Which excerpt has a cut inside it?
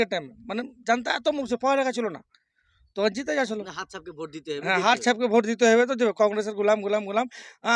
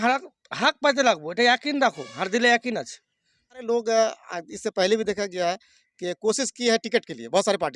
second; 1 cut; at 3.6 s

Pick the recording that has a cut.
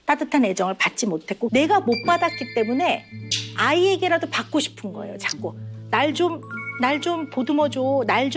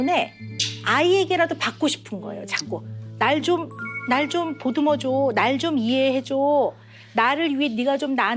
first; 1 cut; at 1.4 s

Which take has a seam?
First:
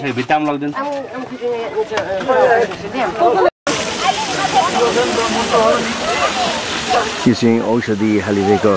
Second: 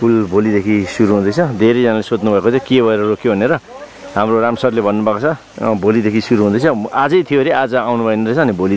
first; 1 cut; at 3.6 s

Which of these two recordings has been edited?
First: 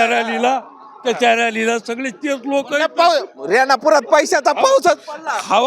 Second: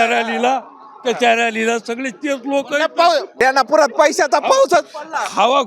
second; 1 cut; at 3.3 s

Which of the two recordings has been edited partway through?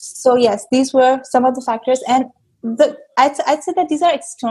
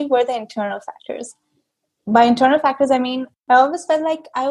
second; 1 cut; at 3.3 s

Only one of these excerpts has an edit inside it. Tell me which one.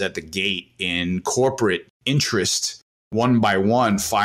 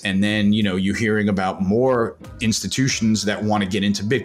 first; 2 cuts; at 1.9 s, 3.1 s

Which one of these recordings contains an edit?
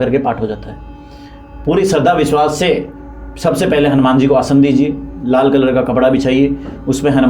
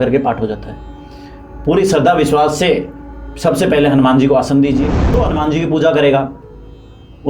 second; 1 cut; at 5.2 s

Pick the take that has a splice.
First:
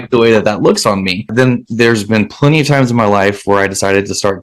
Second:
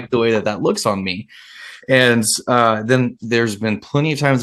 first; 1 cut; at 1.3 s

